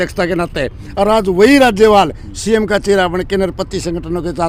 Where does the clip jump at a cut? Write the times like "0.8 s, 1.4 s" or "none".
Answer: none